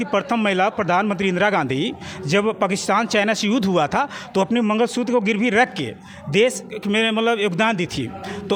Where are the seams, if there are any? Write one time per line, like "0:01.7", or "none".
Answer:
none